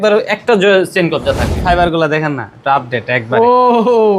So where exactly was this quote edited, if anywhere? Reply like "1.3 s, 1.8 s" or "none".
1.6 s